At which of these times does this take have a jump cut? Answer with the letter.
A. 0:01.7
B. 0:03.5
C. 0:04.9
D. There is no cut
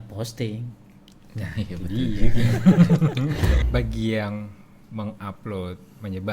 B